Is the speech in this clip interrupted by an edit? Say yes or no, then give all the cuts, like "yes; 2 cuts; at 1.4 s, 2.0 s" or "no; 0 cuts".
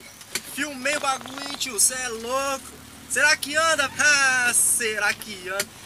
yes; 1 cut; at 3.9 s